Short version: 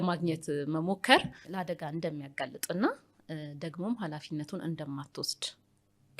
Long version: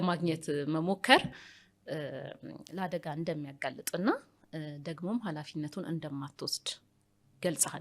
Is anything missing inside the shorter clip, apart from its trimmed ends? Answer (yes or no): yes